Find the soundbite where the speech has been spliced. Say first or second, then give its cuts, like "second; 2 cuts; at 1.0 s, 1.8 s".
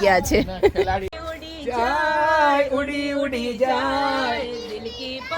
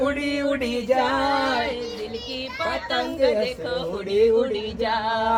first; 1 cut; at 1.4 s